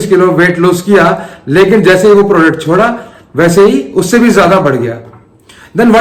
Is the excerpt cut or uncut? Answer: uncut